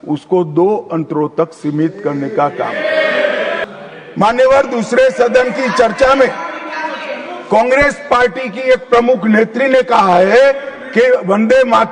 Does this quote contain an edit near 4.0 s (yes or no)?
yes